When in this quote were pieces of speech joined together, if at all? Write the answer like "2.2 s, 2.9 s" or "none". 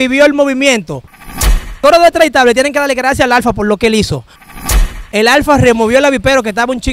1.5 s, 4.5 s